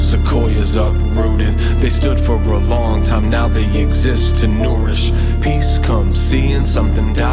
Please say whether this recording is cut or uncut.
uncut